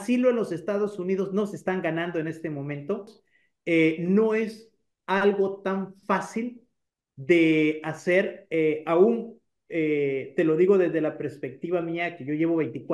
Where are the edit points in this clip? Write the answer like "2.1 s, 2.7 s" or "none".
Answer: 3.2 s